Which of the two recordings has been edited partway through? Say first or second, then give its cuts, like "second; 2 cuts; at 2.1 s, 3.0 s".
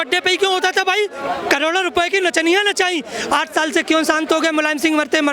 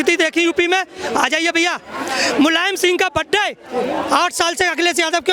first; 1 cut; at 1.3 s